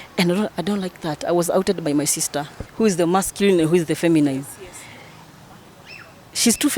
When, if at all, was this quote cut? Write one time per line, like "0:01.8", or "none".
0:02.6